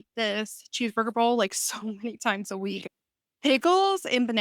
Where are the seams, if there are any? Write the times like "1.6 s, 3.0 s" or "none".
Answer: 2.8 s